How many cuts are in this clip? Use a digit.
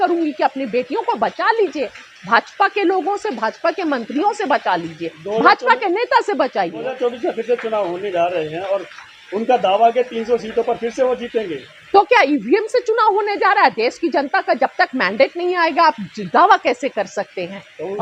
1